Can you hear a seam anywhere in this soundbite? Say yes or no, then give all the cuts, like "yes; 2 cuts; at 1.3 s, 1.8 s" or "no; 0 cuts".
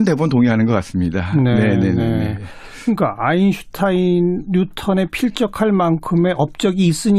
yes; 1 cut; at 3.7 s